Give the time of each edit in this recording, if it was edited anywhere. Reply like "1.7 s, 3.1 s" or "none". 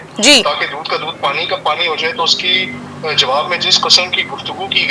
none

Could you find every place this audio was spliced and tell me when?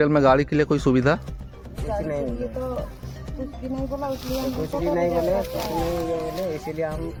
none

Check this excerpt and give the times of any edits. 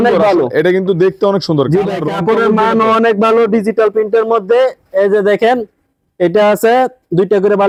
none

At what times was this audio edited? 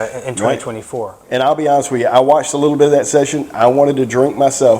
1.2 s

